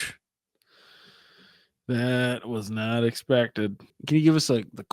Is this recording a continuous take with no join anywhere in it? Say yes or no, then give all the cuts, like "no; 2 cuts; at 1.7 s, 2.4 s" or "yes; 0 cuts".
no; 1 cut; at 3.9 s